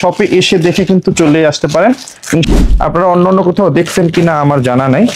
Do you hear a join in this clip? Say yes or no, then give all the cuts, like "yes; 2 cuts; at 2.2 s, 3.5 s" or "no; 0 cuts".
yes; 1 cut; at 2.5 s